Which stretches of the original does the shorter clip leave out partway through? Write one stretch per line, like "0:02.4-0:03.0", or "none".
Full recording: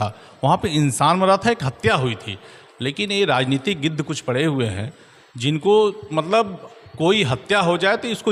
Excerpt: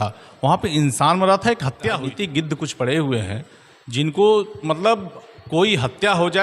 0:02.1-0:03.6